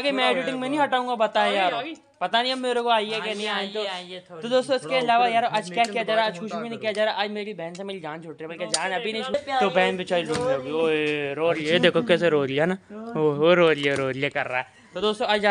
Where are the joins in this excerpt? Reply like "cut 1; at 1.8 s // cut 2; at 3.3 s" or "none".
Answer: cut 1; at 9.3 s

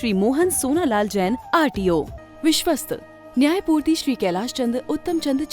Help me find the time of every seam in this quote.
cut 1; at 2.2 s

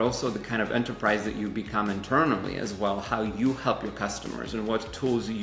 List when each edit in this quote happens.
none

